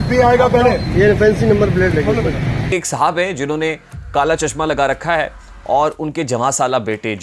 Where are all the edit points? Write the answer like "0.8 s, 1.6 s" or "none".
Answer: 2.7 s